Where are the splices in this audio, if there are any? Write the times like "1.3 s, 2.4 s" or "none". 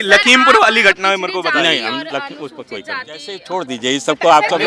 3.4 s